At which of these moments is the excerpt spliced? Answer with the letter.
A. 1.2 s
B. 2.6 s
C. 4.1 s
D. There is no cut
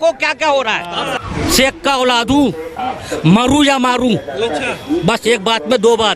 A